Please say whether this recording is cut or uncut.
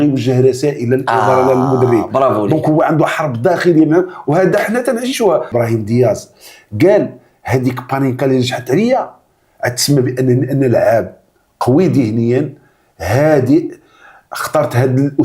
cut